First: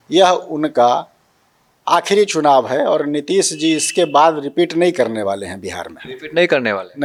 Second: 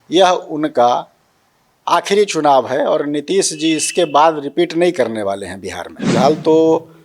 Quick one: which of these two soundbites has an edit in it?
second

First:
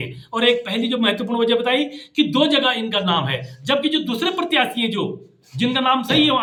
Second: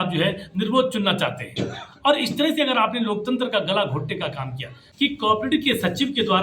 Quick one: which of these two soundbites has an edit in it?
second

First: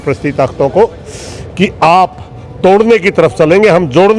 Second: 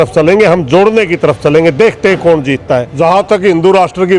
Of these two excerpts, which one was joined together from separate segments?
second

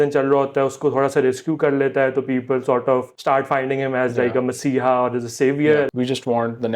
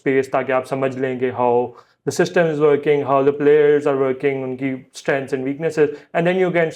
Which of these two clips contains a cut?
first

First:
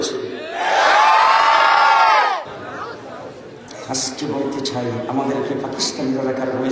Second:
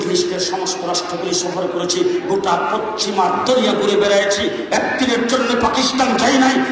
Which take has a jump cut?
first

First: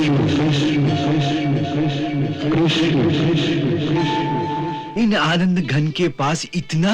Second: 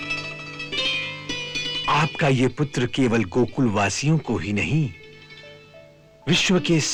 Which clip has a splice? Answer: first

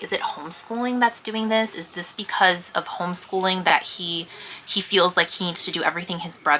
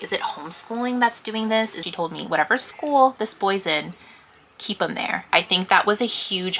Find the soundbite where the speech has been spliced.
second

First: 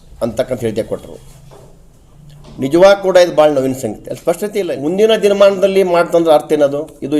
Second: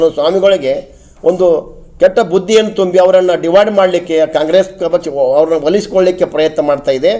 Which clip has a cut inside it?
first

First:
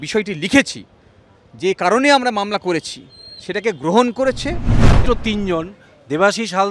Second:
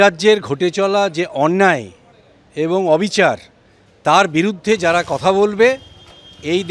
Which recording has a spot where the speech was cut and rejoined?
first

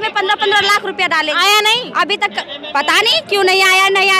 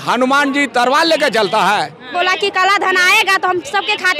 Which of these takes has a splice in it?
second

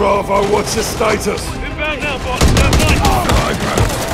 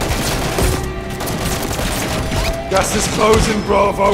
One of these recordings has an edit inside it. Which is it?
first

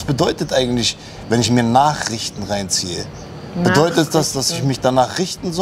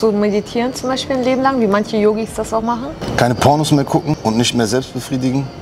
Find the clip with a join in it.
second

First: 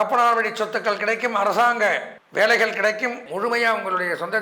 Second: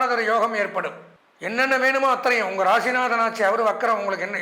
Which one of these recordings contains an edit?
first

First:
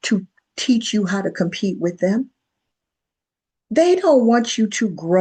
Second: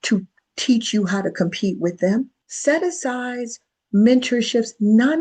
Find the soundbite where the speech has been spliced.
second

